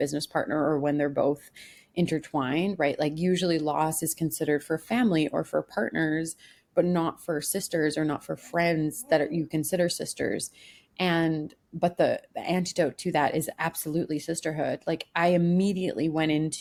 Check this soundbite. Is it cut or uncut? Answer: uncut